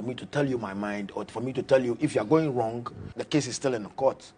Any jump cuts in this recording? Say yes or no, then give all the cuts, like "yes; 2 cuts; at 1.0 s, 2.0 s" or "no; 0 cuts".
yes; 1 cut; at 3.1 s